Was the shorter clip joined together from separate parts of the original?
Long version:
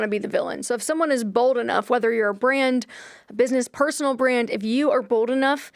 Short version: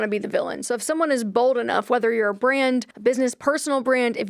yes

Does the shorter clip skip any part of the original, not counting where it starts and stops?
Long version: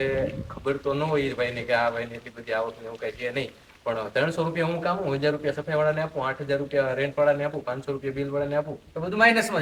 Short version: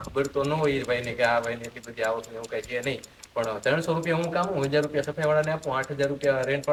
no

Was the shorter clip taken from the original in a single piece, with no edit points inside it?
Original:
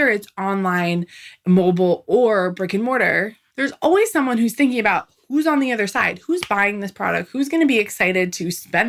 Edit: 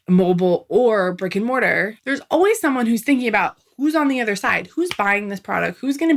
no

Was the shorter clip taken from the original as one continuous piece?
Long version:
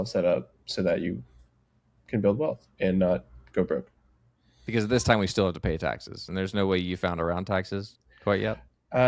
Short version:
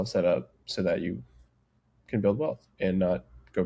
yes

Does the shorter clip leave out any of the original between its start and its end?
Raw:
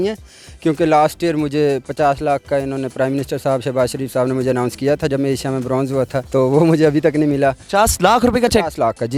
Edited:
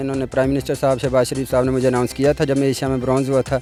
no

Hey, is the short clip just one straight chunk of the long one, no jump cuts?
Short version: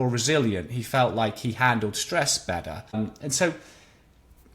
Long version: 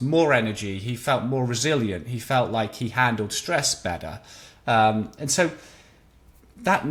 no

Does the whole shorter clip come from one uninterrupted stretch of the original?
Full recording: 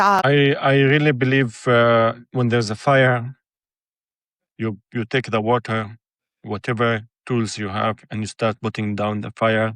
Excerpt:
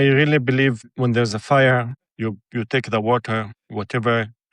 no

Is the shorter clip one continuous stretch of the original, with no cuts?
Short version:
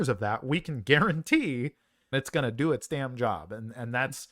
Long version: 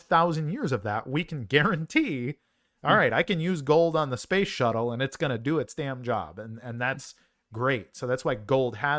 no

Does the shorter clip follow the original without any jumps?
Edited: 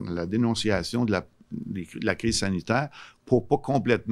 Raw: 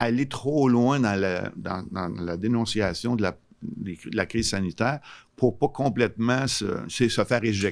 yes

